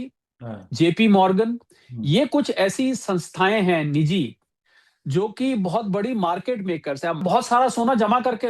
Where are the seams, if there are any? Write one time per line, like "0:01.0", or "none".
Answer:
0:07.2